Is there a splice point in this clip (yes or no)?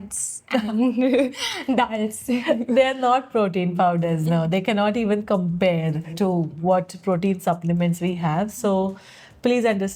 yes